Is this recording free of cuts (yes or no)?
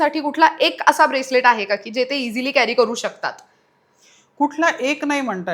yes